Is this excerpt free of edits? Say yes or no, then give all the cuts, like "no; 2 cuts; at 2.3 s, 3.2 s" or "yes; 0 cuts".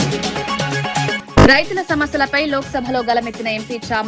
no; 1 cut; at 1.2 s